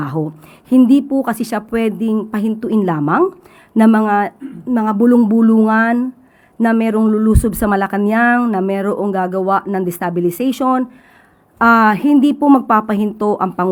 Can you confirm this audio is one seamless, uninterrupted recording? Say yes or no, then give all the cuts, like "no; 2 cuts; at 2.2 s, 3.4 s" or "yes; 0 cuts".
yes; 0 cuts